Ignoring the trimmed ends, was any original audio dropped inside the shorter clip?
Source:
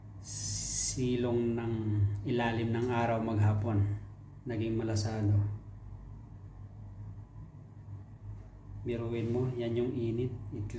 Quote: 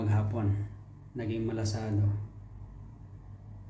no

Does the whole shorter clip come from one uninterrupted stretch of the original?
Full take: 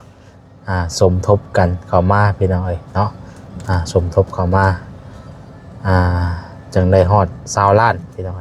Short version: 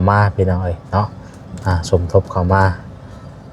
yes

